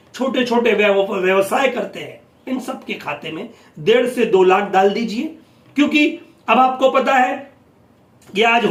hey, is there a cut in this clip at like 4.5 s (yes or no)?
no